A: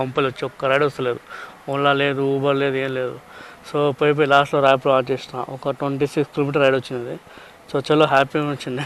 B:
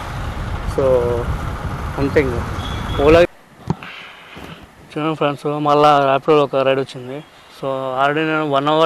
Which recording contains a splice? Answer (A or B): B